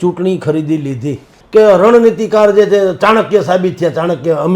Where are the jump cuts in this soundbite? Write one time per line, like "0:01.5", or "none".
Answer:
0:01.3